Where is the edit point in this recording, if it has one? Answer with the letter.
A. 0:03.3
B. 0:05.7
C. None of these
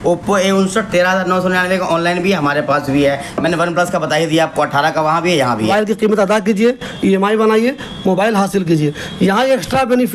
B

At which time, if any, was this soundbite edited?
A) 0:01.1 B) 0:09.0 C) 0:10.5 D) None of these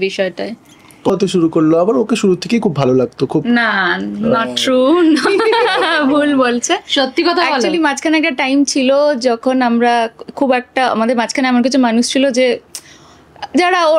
A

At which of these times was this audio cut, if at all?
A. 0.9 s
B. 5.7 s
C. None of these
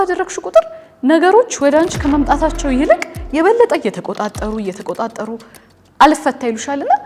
C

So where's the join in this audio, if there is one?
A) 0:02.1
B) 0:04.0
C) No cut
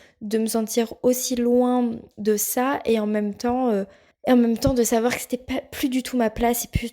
A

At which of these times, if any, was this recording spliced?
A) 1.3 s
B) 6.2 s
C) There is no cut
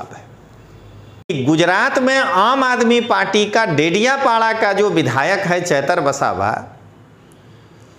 A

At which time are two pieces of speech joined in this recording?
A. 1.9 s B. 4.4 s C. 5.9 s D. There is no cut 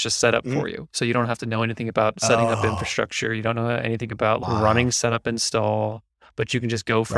B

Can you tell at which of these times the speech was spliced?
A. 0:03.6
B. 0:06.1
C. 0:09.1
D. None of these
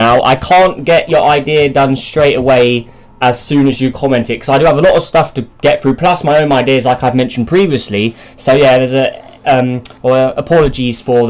B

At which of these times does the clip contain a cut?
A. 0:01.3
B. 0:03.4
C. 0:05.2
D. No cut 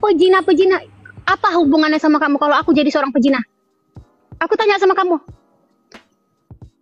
C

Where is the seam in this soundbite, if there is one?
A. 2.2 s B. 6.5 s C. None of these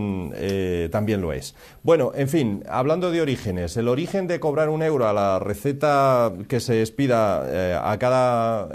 C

